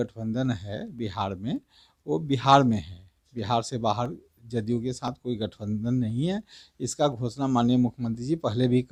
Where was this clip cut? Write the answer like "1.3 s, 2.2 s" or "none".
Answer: none